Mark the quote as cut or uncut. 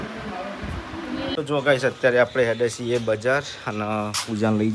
cut